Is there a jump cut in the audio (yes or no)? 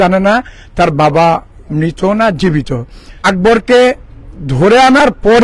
yes